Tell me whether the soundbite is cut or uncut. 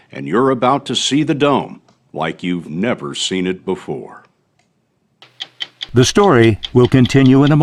uncut